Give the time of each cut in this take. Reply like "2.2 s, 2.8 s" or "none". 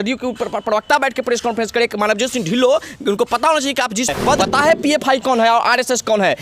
4.4 s